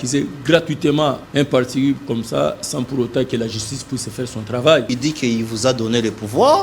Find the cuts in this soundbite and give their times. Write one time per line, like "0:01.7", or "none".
0:01.2
0:04.9